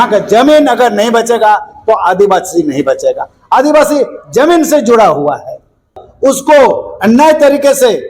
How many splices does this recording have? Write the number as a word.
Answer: one